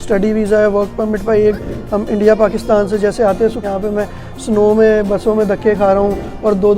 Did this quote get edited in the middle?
yes; 2 cuts; at 1.6 s, 3.6 s

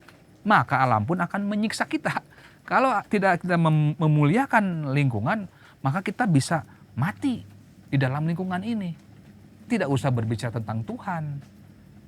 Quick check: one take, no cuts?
yes; 0 cuts

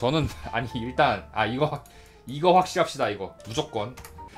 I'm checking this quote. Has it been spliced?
yes; 1 cut; at 3.4 s

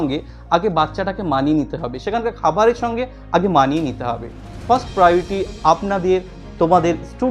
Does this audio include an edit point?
no; 0 cuts

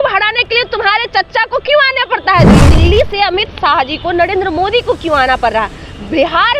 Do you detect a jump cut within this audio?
yes; 1 cut; at 2.7 s

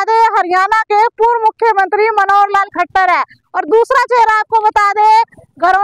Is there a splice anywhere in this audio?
no; 0 cuts

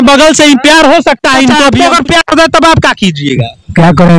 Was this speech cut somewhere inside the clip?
yes; 1 cut; at 1.7 s

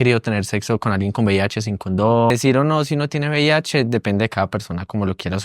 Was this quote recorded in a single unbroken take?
no; 1 cut; at 2.3 s

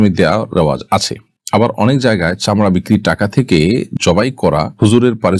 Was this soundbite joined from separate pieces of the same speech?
no; 0 cuts

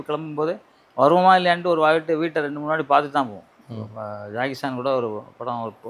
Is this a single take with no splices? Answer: no; 1 cut; at 3.6 s

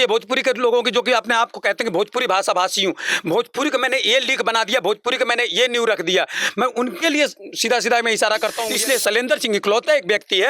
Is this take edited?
yes; 1 cut; at 8.7 s

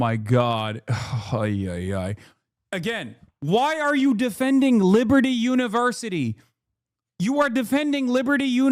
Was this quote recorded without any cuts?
yes; 0 cuts

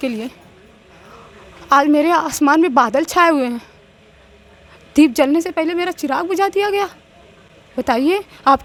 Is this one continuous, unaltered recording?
yes; 0 cuts

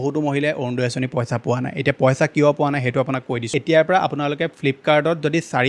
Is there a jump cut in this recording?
yes; 1 cut; at 3.5 s

